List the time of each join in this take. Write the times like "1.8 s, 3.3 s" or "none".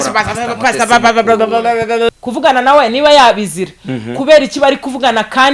2.1 s